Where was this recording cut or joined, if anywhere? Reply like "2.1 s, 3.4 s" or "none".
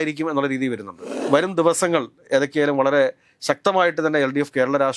1.2 s